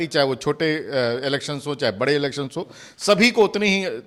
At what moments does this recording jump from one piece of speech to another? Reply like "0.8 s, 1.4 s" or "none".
none